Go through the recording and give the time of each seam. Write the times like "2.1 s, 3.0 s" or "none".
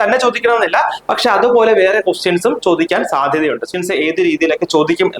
3.7 s